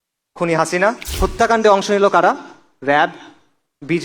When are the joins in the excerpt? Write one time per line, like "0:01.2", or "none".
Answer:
0:01.1